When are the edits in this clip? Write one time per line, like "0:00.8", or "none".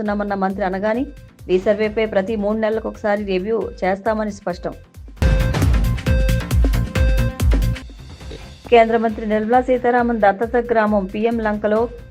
none